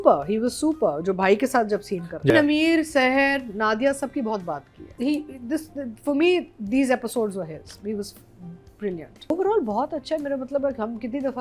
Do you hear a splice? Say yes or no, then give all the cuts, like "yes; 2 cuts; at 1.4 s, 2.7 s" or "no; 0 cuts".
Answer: yes; 3 cuts; at 2.3 s, 4.9 s, 9.3 s